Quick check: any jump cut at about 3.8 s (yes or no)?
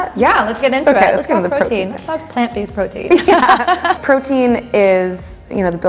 no